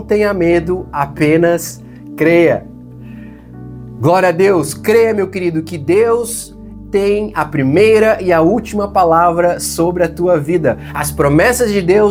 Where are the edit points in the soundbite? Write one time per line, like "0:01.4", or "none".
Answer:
none